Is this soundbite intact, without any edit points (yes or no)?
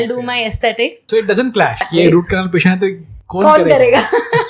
no